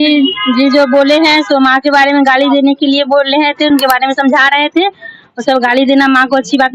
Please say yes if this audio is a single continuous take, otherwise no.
yes